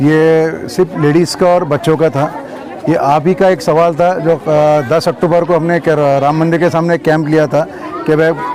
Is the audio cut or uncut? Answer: uncut